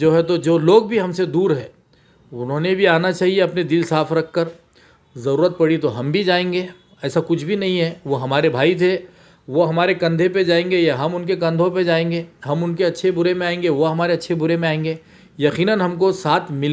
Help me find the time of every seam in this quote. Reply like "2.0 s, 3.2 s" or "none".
none